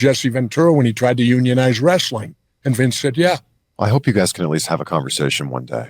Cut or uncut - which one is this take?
cut